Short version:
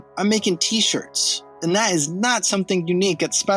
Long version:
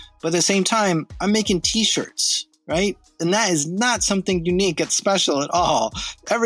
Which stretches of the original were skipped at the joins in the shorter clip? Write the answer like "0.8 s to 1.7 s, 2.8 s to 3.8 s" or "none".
2.5 s to 3.1 s